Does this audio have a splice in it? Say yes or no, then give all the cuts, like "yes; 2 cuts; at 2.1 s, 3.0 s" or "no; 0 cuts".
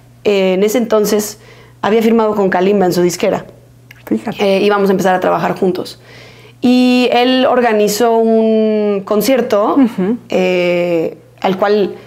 no; 0 cuts